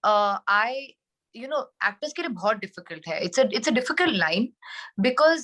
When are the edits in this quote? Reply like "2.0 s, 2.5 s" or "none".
none

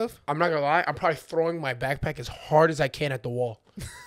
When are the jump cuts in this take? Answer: none

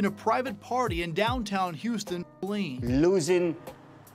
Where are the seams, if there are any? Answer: 2.4 s

